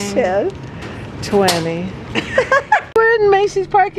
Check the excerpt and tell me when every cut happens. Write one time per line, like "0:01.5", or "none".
0:02.9